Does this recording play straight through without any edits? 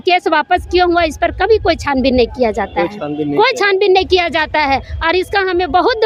yes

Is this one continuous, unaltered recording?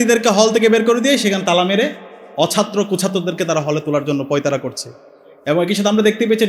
yes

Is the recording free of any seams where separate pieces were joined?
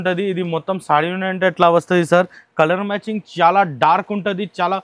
yes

